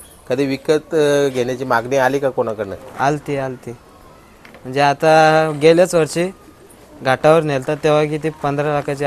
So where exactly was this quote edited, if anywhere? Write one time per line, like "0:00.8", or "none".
none